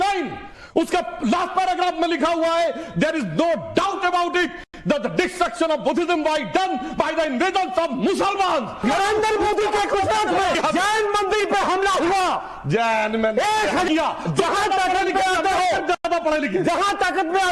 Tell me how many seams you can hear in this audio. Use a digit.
3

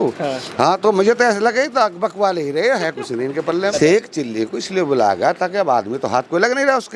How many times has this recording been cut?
1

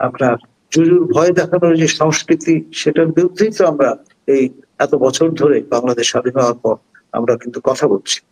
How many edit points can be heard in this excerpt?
0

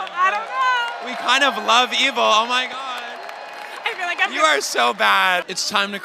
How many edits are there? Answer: 1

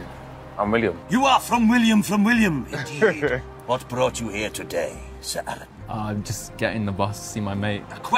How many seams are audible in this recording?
1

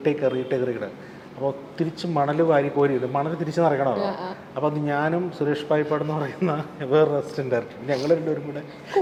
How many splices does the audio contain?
0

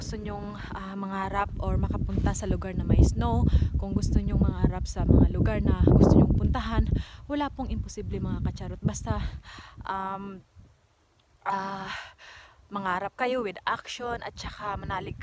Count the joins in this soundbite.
0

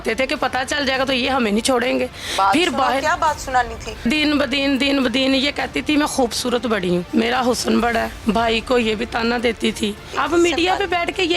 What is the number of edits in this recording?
4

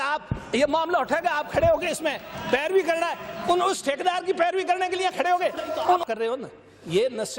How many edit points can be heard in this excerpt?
1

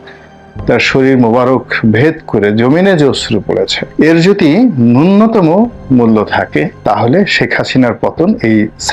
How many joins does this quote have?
2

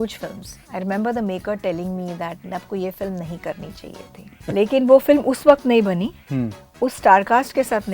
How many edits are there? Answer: 1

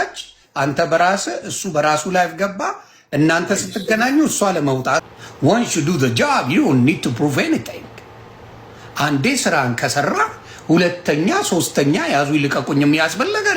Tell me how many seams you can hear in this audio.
1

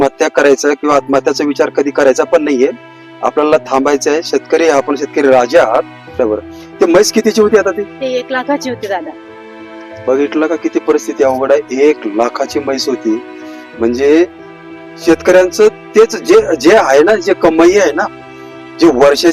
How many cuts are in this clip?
1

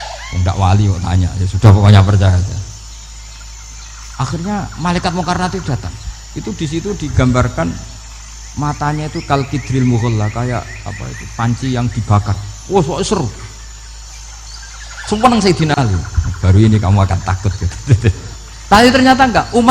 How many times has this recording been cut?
1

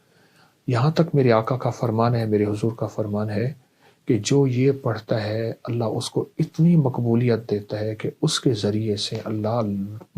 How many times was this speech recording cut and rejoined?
0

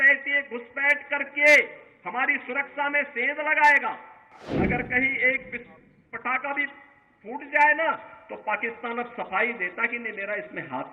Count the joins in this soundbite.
1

